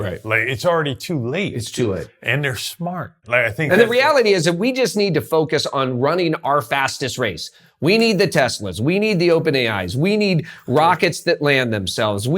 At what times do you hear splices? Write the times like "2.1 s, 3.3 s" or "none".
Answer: 3.1 s

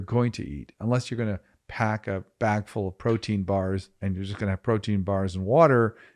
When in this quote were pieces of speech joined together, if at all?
3.9 s

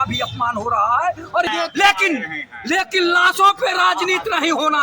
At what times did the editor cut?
1.5 s

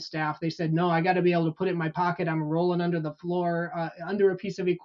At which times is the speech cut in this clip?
none

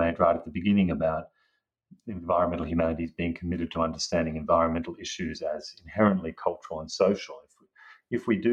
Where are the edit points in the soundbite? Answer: none

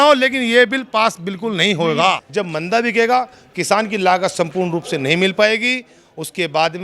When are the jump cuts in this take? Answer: 2.2 s

